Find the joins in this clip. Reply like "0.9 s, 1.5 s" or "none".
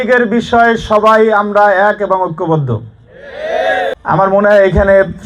4.0 s

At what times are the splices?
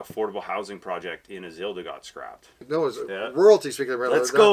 2.7 s

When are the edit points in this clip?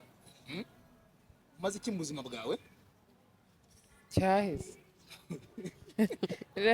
none

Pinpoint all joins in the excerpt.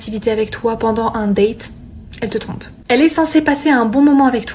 none

